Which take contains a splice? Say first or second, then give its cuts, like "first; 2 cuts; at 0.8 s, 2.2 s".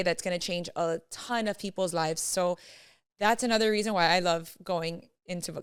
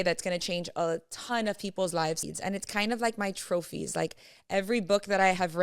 second; 1 cut; at 2.2 s